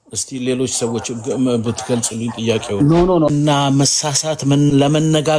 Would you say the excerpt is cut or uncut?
cut